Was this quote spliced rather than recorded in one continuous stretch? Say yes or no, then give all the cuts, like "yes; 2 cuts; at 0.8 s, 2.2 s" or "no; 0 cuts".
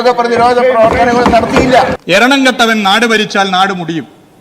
yes; 1 cut; at 2.0 s